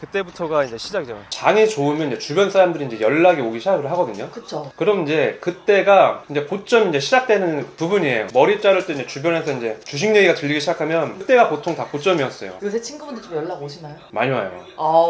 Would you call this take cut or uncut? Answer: cut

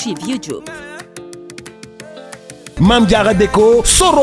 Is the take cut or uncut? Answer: cut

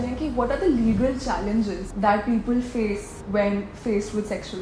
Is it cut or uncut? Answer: cut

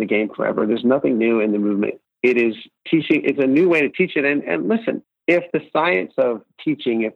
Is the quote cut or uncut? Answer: cut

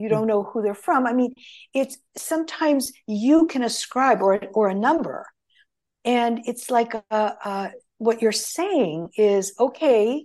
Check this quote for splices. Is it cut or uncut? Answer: uncut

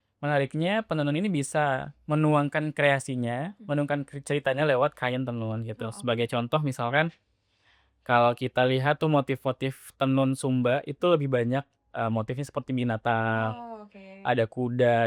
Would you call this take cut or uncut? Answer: uncut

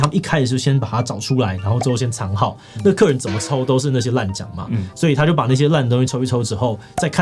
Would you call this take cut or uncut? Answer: uncut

